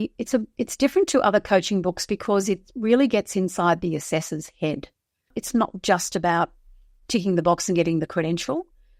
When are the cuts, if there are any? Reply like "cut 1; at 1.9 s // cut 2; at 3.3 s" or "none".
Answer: cut 1; at 5.4 s